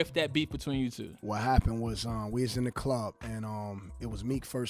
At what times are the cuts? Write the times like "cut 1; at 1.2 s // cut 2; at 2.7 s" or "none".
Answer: cut 1; at 1.4 s